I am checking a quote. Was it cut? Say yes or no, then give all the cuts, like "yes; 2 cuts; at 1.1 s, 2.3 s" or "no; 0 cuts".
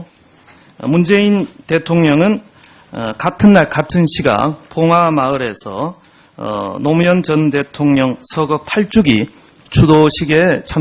yes; 1 cut; at 1.5 s